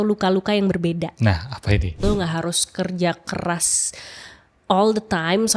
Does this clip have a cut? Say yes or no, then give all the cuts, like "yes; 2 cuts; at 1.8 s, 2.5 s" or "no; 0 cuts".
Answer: yes; 1 cut; at 1.9 s